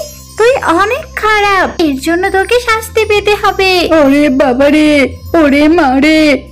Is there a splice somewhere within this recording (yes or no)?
yes